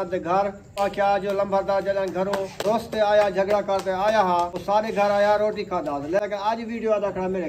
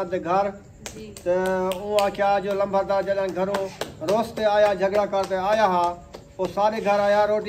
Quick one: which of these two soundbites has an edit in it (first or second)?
first